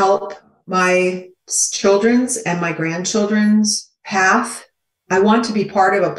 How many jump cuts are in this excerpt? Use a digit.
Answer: 0